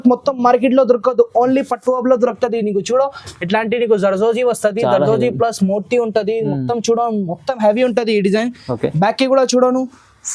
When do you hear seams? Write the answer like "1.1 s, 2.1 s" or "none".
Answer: none